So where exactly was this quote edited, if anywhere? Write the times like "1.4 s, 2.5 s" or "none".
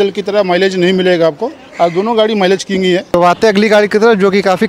3.1 s